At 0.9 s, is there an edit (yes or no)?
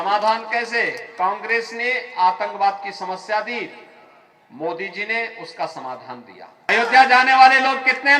no